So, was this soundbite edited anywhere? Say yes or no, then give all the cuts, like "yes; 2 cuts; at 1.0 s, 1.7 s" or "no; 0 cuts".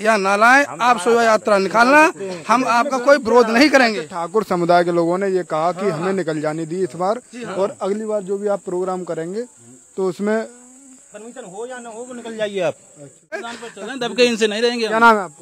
yes; 1 cut; at 13.6 s